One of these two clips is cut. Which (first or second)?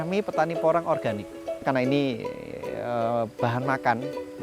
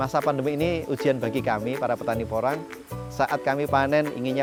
first